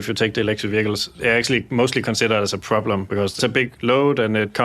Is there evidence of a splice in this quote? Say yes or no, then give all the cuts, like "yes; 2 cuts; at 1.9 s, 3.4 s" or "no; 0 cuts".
yes; 1 cut; at 1.4 s